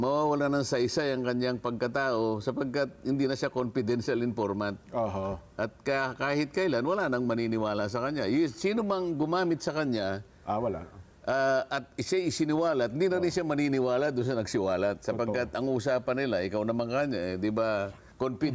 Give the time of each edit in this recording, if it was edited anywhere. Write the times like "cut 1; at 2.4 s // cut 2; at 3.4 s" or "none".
none